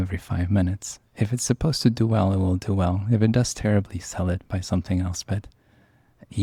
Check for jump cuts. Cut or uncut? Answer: uncut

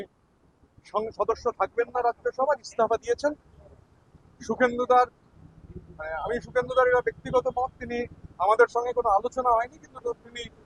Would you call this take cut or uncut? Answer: uncut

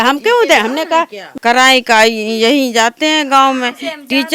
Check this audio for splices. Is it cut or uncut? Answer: cut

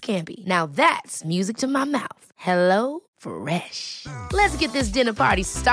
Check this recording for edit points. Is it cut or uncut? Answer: uncut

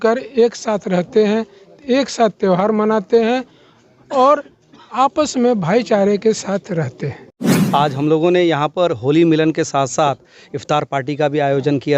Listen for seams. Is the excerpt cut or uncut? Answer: cut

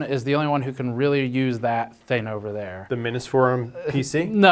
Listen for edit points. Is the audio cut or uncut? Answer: uncut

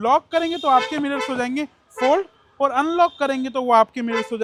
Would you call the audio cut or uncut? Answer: uncut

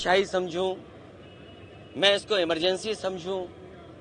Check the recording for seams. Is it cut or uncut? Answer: uncut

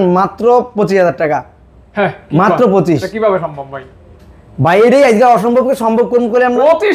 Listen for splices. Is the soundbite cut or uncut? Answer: uncut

